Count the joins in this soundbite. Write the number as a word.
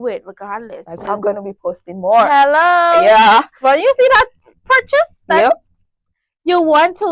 one